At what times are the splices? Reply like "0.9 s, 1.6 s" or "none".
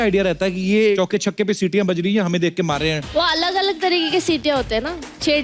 1.0 s, 3.1 s